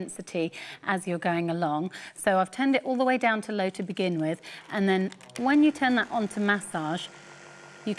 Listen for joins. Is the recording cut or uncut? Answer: uncut